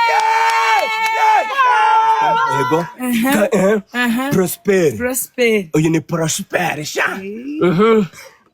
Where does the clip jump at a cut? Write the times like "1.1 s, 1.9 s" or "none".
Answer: 2.6 s